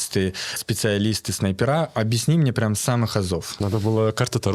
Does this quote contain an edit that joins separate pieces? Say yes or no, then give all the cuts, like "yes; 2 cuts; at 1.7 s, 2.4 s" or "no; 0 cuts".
yes; 1 cut; at 3.5 s